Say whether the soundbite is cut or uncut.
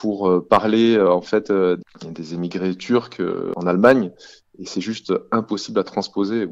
cut